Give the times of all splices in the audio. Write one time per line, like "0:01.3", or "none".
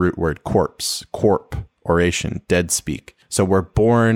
0:03.2